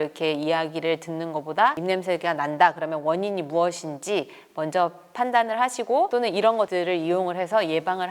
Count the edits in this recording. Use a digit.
2